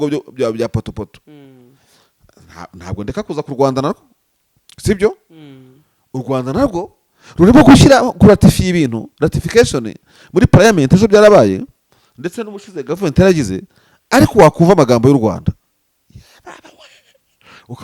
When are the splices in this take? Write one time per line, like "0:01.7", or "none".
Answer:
none